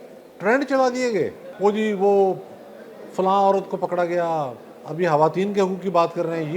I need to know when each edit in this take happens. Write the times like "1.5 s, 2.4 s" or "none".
1.4 s